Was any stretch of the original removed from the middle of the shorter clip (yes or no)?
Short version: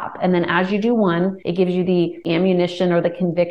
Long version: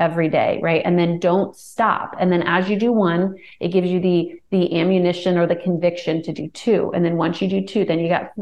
yes